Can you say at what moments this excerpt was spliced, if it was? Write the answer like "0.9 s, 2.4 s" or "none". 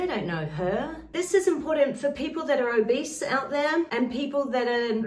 1.1 s, 3.9 s